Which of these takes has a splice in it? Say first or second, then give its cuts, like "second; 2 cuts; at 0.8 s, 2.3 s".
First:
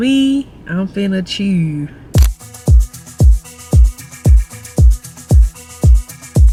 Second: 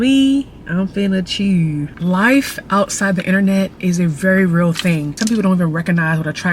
second; 2 cuts; at 1.9 s, 5.1 s